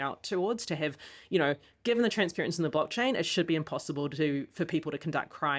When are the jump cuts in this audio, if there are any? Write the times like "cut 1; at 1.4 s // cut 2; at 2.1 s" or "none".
none